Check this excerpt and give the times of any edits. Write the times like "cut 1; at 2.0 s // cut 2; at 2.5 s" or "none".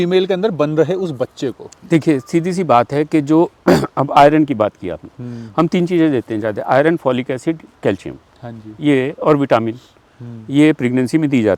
none